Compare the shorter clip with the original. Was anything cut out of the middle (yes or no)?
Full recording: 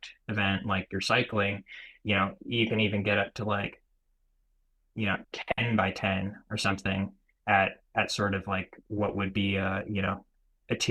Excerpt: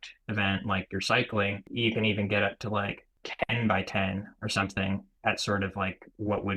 yes